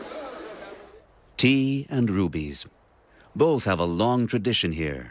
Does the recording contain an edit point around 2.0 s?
no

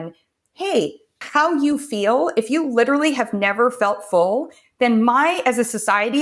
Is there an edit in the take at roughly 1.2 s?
yes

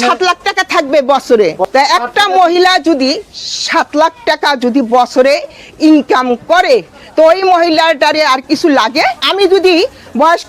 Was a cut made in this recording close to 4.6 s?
no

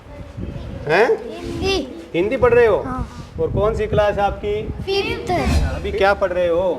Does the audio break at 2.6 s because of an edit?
no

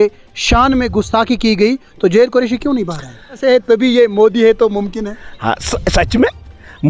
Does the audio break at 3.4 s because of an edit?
yes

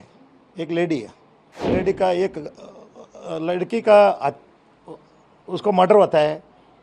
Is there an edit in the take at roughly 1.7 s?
yes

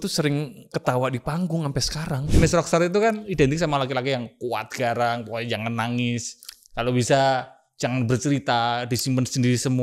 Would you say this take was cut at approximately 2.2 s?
yes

